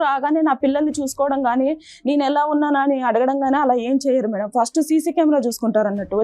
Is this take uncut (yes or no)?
yes